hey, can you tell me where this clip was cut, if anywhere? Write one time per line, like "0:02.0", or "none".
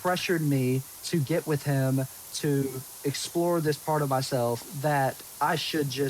0:00.9
0:02.9
0:05.2

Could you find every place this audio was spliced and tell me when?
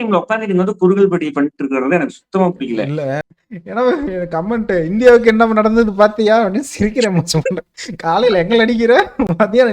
0:03.3

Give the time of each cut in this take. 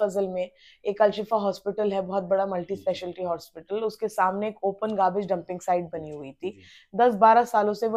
none

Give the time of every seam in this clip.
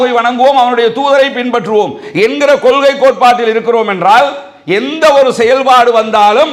none

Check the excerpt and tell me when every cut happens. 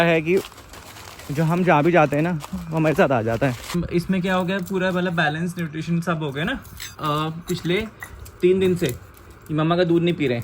0:03.8
0:06.8

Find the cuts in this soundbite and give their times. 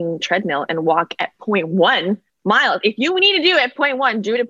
0:02.3

